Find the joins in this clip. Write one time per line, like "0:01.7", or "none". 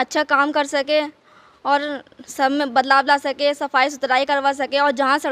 none

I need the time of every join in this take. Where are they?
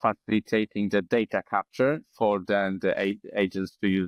none

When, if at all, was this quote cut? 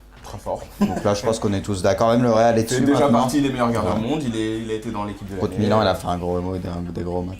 0:02.9

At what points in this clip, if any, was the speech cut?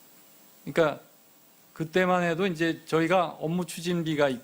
0:02.0

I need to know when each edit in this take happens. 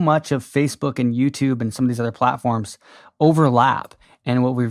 none

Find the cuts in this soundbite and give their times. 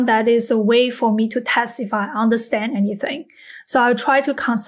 none

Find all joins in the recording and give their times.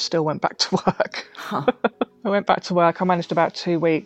0:02.1

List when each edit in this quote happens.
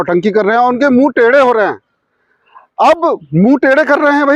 none

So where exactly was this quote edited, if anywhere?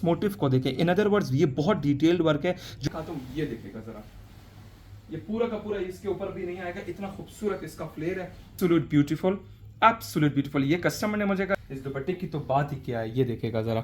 0:02.7
0:08.5
0:11.5

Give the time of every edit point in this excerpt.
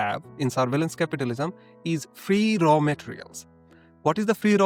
none

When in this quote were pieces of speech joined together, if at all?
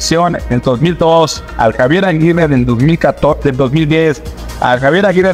none

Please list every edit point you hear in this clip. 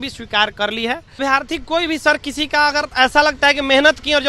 0:01.2

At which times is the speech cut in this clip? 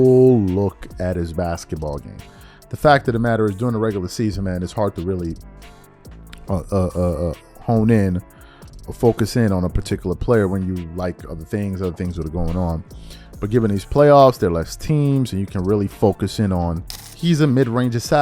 0:16.9

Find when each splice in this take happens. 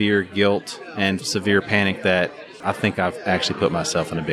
0:01.3
0:02.5

